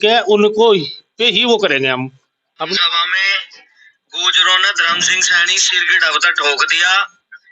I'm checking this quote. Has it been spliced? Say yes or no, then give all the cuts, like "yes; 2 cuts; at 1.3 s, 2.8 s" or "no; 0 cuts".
yes; 1 cut; at 2.7 s